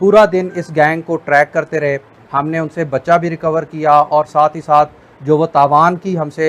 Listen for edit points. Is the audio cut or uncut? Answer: cut